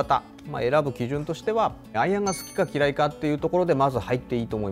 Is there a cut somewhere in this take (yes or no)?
yes